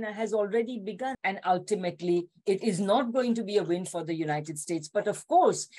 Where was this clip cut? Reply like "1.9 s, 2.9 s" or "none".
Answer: 1.1 s